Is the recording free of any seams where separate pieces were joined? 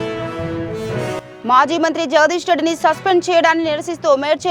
yes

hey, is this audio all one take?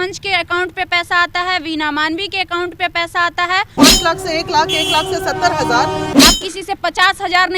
no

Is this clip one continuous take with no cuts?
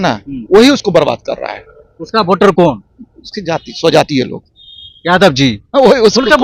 yes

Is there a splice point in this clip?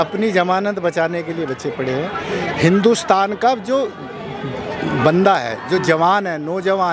no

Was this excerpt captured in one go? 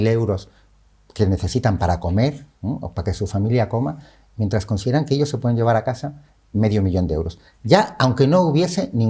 yes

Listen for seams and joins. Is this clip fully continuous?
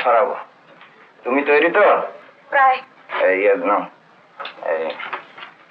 yes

